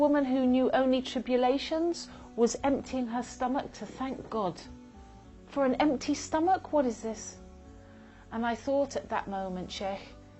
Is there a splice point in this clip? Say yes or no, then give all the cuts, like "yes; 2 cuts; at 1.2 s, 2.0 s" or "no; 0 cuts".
no; 0 cuts